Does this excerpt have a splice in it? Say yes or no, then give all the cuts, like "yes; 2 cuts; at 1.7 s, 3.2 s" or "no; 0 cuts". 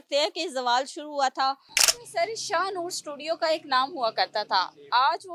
yes; 1 cut; at 1.7 s